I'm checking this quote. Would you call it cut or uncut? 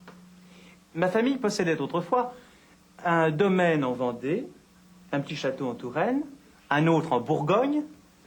cut